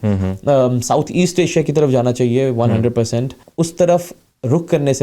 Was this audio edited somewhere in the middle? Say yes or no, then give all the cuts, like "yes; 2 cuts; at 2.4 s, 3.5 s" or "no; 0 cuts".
yes; 1 cut; at 3.4 s